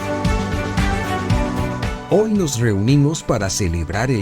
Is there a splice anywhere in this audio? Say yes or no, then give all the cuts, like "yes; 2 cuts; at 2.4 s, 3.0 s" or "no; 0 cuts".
yes; 1 cut; at 2.0 s